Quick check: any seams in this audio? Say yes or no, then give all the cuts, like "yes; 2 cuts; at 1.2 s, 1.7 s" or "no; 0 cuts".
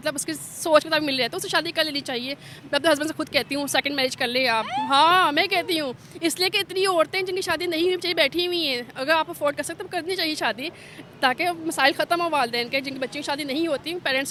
no; 0 cuts